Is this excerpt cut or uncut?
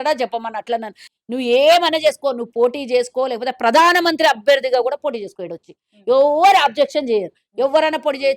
cut